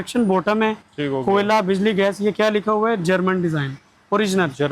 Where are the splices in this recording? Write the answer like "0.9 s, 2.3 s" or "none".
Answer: none